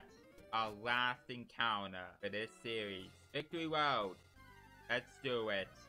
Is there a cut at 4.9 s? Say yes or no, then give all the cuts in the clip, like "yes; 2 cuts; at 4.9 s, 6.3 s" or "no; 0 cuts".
no; 2 cuts; at 2.1 s, 3.5 s